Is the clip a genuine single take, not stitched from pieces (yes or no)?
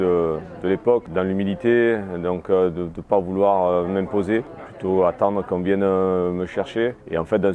yes